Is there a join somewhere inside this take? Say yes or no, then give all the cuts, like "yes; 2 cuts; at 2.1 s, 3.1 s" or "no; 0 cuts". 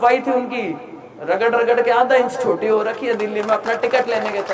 no; 0 cuts